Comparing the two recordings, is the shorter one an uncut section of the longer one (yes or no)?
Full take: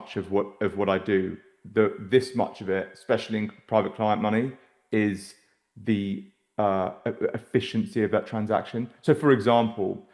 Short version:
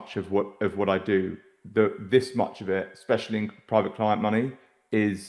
yes